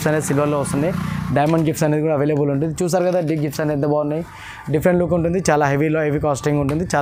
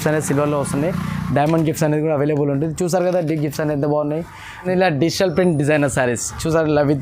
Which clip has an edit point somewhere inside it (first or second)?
second